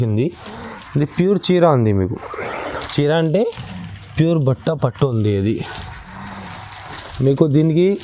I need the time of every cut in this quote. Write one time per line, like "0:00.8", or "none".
none